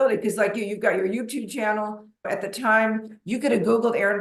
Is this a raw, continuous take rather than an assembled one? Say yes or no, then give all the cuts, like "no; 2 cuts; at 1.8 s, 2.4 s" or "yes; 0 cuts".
yes; 0 cuts